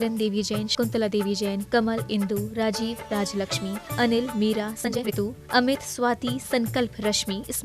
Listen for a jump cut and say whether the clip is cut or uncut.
cut